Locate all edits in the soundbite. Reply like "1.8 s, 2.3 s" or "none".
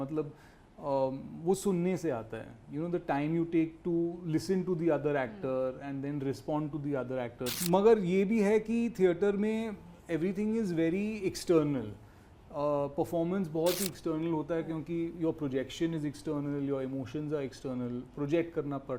7.5 s